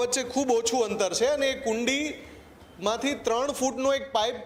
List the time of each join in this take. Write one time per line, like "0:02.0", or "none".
none